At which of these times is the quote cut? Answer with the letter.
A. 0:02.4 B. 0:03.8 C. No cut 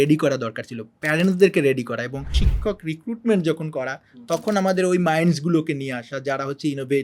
A